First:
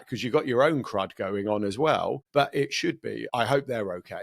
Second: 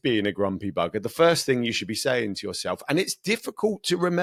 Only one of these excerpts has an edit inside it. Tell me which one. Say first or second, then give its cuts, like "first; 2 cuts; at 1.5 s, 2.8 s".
first; 2 cuts; at 2.2 s, 3.3 s